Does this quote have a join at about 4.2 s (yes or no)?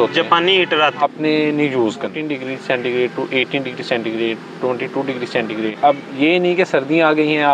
no